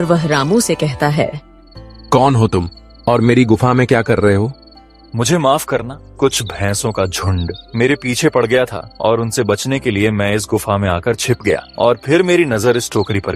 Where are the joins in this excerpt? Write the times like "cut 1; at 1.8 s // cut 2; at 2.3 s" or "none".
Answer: cut 1; at 6.0 s // cut 2; at 7.6 s // cut 3; at 8.8 s // cut 4; at 11.7 s